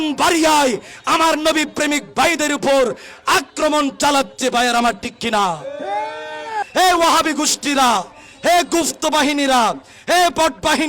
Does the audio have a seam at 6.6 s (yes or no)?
yes